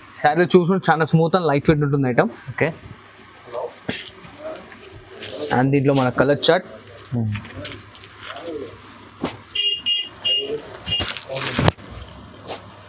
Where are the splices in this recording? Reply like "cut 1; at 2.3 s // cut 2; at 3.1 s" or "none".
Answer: none